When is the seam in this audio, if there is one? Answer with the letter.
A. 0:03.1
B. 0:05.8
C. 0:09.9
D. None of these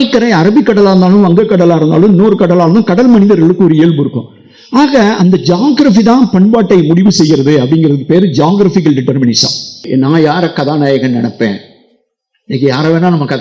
C